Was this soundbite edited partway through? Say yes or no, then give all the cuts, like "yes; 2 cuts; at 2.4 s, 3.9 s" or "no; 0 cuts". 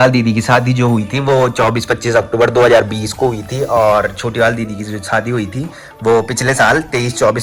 no; 0 cuts